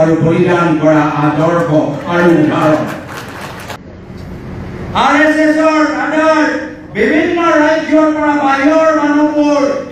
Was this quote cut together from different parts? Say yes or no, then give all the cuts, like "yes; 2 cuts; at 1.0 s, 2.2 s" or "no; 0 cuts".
yes; 1 cut; at 3.8 s